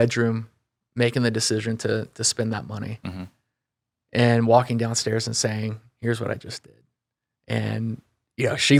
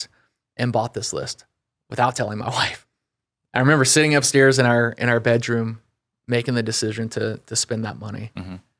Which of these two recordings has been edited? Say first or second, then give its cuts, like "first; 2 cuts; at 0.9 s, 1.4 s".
second; 1 cut; at 2.8 s